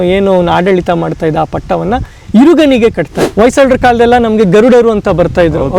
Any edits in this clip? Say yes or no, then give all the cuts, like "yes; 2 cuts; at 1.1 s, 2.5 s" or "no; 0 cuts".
yes; 1 cut; at 3.1 s